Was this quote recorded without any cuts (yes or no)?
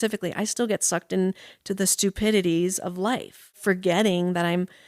no